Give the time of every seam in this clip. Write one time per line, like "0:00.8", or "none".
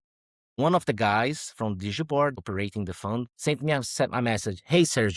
0:02.7